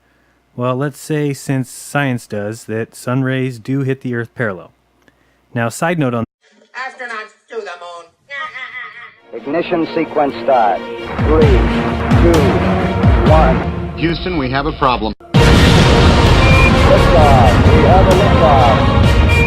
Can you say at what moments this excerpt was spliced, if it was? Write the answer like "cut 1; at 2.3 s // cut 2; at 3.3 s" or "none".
none